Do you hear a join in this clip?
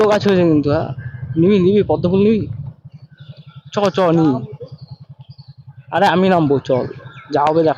no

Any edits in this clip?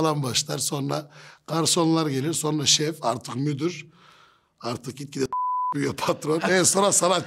no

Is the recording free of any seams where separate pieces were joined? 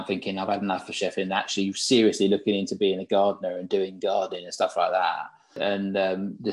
no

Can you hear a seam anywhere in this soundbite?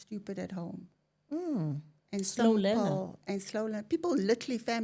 no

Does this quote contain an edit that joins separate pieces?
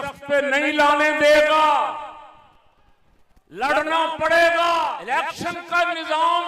yes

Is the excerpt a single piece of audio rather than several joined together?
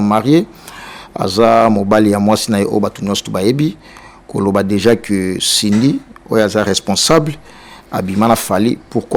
yes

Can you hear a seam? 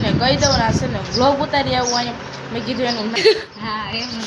yes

